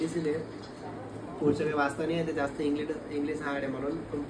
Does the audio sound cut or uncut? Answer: uncut